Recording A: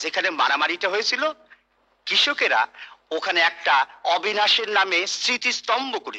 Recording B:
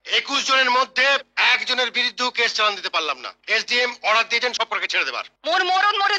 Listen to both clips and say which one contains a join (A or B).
B